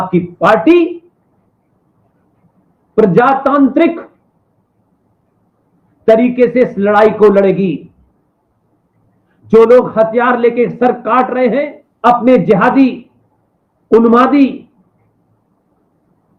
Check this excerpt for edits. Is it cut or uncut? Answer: cut